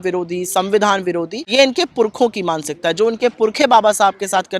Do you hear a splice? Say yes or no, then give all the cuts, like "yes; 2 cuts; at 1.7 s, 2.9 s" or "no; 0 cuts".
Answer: yes; 1 cut; at 1.4 s